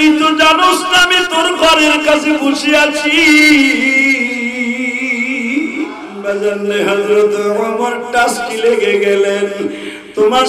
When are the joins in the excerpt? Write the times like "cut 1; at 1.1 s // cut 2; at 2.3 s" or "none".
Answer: cut 1; at 6.1 s